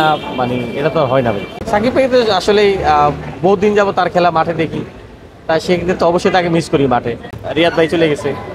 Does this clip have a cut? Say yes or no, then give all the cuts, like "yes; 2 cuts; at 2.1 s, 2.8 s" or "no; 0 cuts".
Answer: yes; 2 cuts; at 1.5 s, 7.4 s